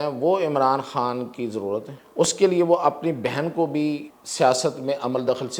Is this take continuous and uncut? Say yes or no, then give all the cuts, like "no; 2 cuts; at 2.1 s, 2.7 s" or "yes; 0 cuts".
no; 2 cuts; at 2.0 s, 4.2 s